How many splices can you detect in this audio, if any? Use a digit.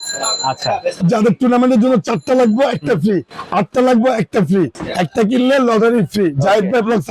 1